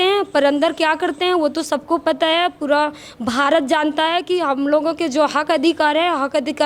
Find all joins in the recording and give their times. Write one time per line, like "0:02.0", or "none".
none